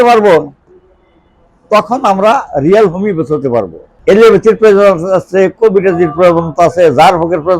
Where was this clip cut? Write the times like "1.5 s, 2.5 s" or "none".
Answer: 3.8 s